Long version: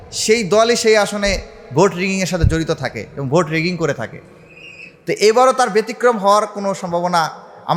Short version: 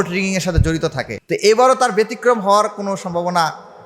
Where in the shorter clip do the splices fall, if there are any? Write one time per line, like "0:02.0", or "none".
0:01.1